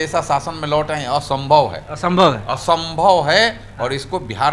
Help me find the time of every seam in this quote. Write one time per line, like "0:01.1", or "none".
none